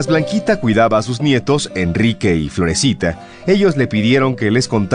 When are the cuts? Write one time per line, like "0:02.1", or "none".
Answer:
none